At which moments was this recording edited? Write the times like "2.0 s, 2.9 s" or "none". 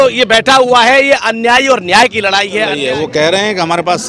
2.8 s